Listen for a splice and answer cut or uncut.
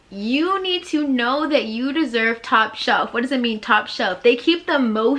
uncut